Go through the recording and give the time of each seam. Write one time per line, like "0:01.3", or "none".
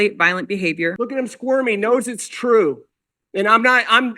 0:01.0